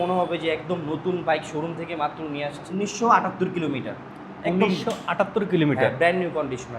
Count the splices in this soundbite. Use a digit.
1